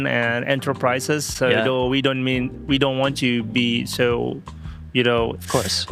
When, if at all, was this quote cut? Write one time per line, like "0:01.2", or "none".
none